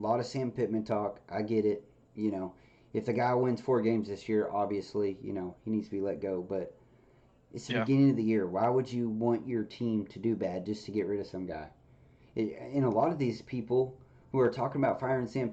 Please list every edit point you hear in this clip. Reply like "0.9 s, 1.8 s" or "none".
none